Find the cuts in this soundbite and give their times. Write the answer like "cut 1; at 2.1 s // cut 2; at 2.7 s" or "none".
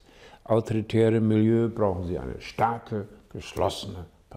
none